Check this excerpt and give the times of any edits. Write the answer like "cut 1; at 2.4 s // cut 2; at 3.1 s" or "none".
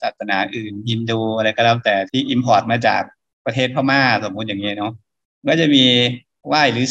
cut 1; at 2.1 s